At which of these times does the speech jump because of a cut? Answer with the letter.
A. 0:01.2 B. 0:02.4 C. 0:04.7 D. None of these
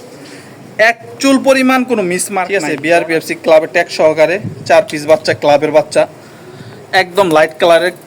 B